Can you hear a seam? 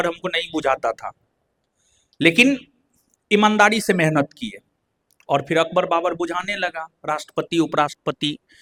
no; 0 cuts

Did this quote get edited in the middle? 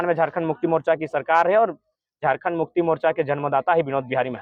no; 0 cuts

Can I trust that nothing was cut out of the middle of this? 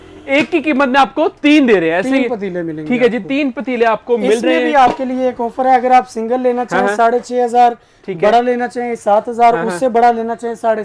yes; 0 cuts

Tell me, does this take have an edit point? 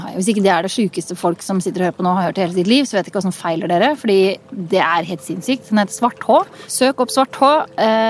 yes; 1 cut; at 6.6 s

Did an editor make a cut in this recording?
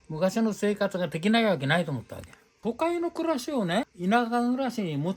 yes; 2 cuts; at 2.5 s, 3.9 s

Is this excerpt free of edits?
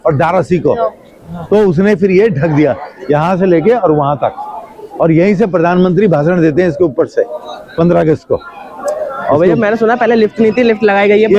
yes; 0 cuts

